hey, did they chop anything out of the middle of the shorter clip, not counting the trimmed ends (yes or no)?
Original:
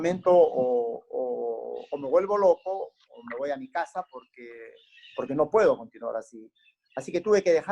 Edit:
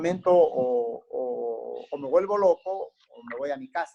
no